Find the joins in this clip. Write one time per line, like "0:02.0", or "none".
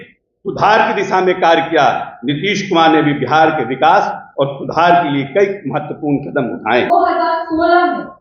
0:06.9

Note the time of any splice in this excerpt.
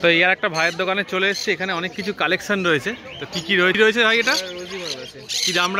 none

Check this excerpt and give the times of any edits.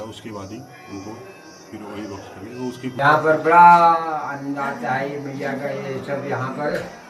0:02.9

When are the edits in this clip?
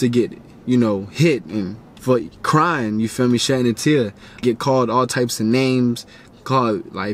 0:01.9
0:04.4

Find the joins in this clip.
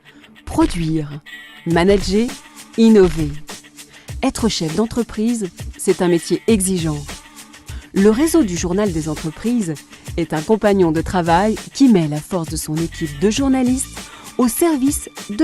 none

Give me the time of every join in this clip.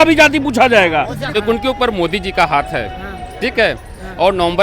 0:01.3

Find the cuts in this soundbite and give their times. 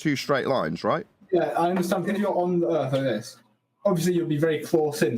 0:02.1

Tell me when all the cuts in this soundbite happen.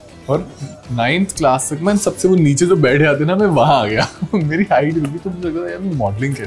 none

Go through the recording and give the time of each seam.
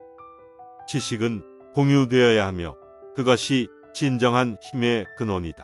0:00.9

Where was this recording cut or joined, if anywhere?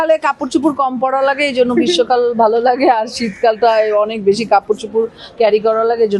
none

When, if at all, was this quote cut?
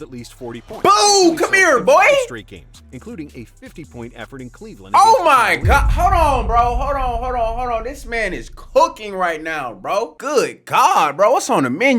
none

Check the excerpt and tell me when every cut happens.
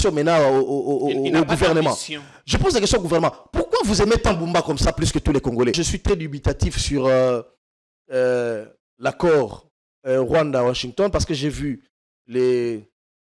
0:05.8

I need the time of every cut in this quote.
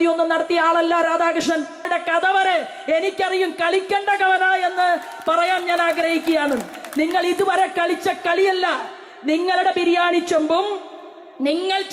0:01.9

